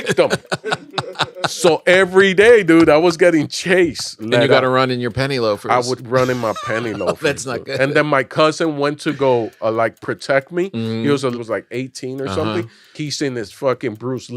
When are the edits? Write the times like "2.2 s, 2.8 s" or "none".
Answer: 4.2 s, 11.3 s, 13.0 s